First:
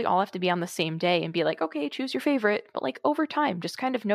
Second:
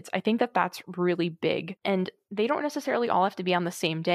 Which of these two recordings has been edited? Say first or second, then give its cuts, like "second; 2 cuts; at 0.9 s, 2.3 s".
second; 1 cut; at 2.0 s